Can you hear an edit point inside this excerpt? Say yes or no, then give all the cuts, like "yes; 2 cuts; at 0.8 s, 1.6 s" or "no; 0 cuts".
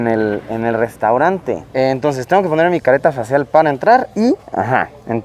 no; 0 cuts